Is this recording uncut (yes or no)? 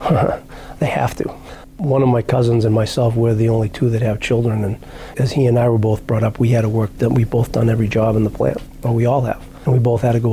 yes